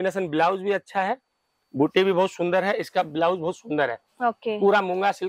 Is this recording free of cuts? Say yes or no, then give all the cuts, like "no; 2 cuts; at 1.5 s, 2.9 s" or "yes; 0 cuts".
yes; 0 cuts